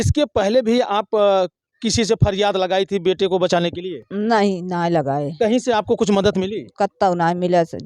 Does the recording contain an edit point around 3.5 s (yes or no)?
no